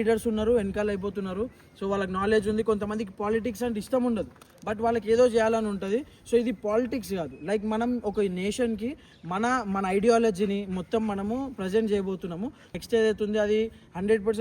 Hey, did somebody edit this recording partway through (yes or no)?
yes